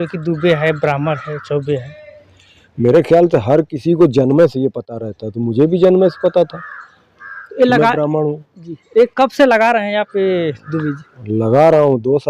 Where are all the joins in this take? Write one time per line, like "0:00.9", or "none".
none